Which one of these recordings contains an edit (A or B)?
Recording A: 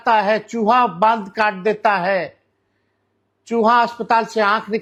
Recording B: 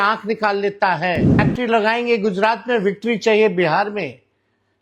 B